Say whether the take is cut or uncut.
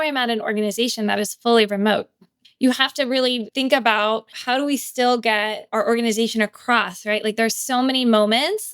cut